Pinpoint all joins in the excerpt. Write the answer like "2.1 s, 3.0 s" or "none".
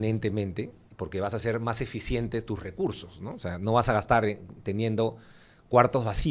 none